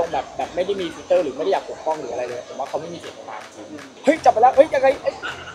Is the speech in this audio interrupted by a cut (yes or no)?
yes